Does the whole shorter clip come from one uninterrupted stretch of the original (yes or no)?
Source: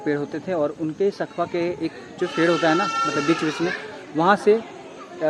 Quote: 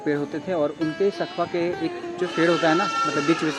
yes